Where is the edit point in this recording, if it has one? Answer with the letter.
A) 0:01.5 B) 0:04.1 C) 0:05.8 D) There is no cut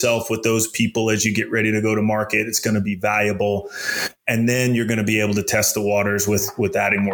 D